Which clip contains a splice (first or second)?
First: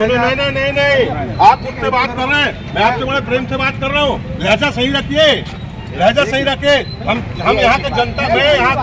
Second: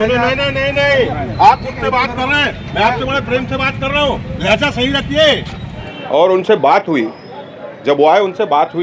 second